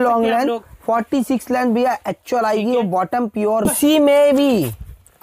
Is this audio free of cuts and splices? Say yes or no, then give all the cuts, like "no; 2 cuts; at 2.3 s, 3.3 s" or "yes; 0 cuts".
no; 1 cut; at 3.7 s